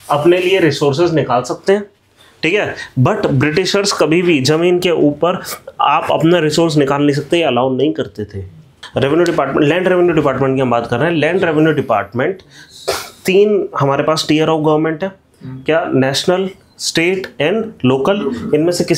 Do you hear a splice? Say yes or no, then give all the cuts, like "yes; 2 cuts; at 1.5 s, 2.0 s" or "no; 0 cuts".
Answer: yes; 1 cut; at 8.8 s